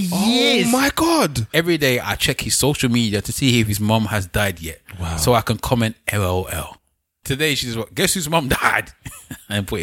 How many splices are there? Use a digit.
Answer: 2